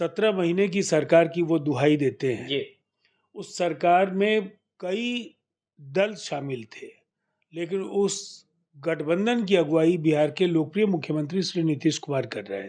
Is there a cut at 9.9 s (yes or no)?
no